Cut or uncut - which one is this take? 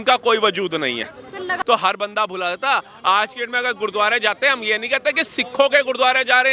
cut